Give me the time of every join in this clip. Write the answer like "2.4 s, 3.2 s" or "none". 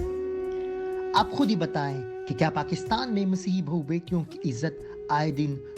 1.1 s